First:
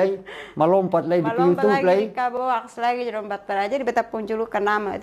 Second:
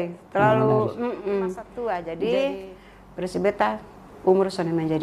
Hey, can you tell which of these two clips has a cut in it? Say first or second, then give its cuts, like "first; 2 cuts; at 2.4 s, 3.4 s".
second; 1 cut; at 1.7 s